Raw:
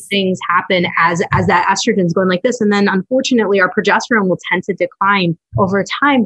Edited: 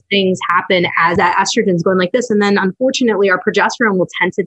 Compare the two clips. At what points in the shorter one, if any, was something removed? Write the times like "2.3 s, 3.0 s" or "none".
1.1 s

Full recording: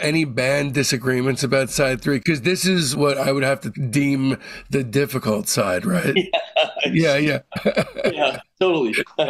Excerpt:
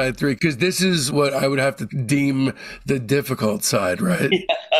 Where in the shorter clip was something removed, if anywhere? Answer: none

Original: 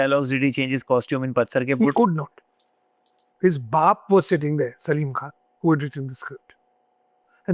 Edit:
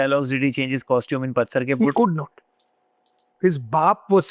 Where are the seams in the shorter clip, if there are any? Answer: none

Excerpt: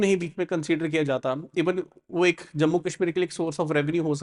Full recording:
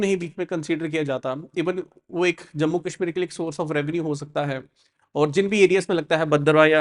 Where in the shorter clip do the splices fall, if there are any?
none

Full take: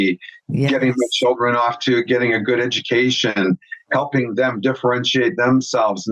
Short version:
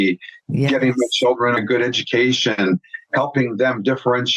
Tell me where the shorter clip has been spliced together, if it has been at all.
1.6 s

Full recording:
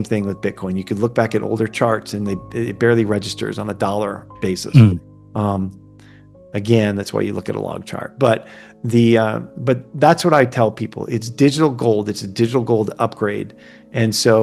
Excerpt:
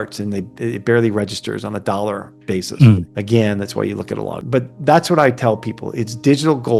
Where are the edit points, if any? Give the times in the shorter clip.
3.1 s, 4.4 s

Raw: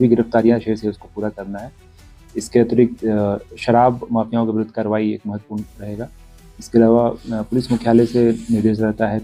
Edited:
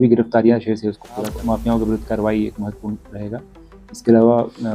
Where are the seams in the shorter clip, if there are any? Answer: 1.4 s

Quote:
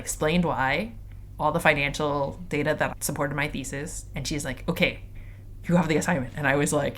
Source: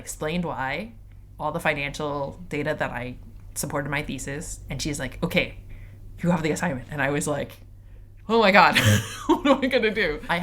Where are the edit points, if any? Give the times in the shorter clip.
2.9 s

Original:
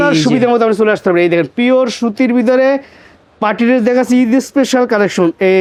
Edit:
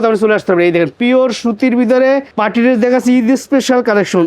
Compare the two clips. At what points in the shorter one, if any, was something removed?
2.3 s

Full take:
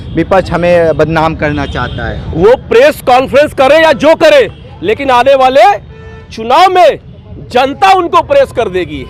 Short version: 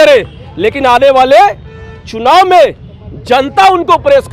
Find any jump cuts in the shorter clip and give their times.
none

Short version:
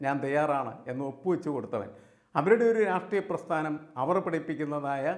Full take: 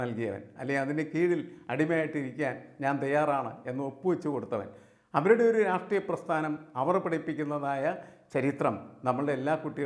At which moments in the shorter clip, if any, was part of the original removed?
none

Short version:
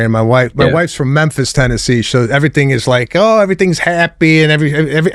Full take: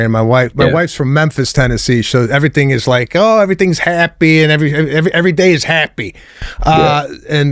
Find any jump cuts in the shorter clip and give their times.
none

